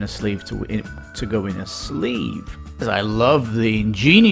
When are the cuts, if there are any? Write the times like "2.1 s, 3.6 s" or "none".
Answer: 2.8 s